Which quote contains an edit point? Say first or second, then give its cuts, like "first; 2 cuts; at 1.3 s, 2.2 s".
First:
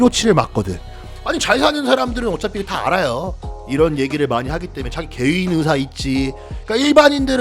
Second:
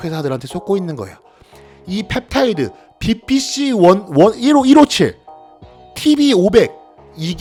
first; 1 cut; at 1.2 s